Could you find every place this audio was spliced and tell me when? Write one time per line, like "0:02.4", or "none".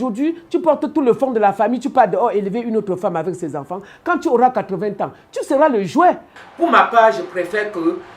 0:06.3